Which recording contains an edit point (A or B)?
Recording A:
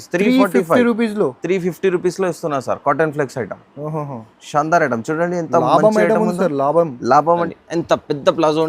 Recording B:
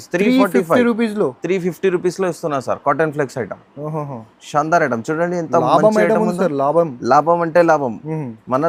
A